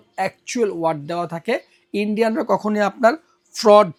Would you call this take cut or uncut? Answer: uncut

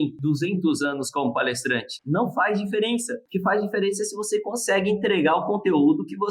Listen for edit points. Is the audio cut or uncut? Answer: cut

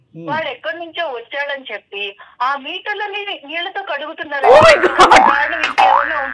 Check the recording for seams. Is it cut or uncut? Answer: uncut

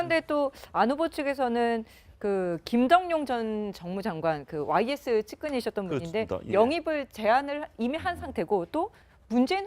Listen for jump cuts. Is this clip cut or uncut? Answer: cut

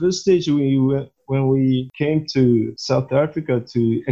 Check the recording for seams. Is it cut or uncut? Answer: cut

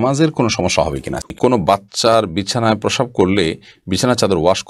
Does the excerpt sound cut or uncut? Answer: cut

